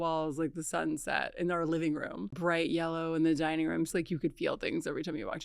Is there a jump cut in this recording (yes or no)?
yes